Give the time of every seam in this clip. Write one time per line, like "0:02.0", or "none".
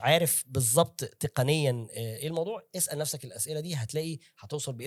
none